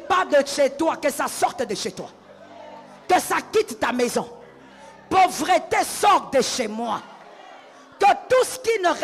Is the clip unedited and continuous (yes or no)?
yes